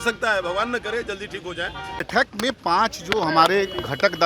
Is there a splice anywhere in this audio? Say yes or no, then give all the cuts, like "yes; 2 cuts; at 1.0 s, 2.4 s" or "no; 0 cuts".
yes; 1 cut; at 1.9 s